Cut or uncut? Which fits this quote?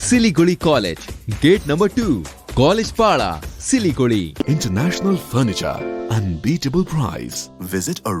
cut